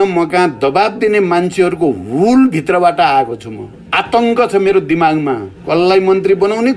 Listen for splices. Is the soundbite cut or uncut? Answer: uncut